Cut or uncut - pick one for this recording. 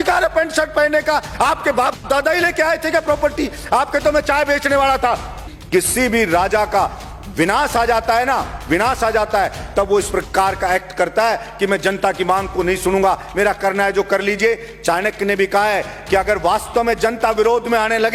cut